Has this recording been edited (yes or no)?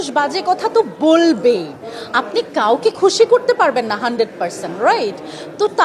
no